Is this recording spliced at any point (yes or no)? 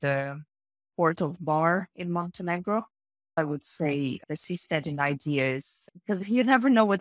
yes